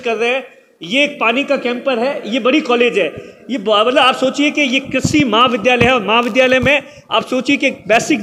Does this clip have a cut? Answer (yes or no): no